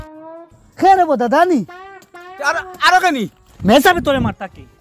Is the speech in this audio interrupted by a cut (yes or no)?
yes